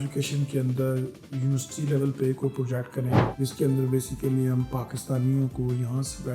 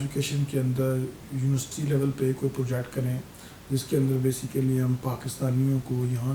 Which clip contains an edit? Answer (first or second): first